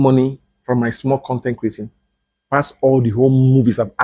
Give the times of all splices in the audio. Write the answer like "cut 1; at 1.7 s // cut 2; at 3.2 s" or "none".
none

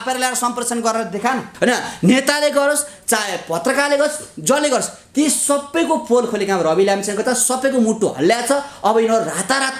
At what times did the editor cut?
cut 1; at 1.5 s

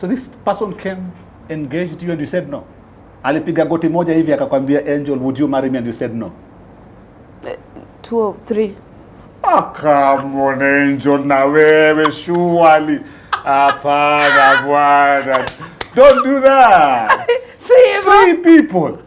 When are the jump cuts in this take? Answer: none

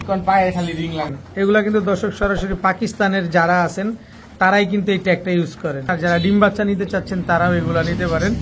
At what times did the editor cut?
cut 1; at 1.2 s // cut 2; at 5.9 s

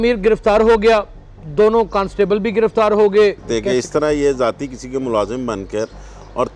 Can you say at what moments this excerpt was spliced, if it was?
cut 1; at 3.4 s

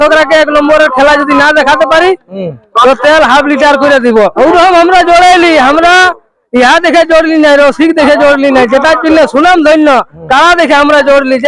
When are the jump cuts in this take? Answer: cut 1; at 4.3 s

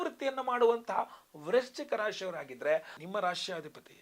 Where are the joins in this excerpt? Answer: cut 1; at 2.9 s

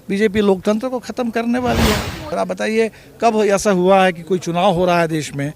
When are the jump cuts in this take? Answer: cut 1; at 2.3 s

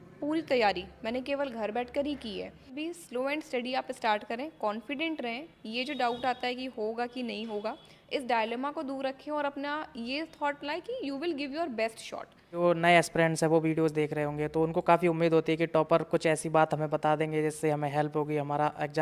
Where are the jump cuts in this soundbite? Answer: cut 1; at 2.7 s // cut 2; at 12.5 s

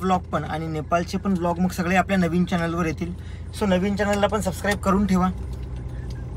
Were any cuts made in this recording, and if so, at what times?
none

